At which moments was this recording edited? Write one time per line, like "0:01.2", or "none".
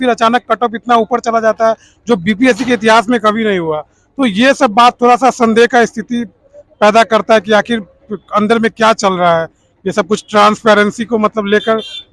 none